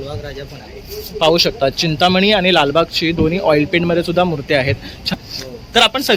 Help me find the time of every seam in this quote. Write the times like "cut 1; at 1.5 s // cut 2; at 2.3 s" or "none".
cut 1; at 5.1 s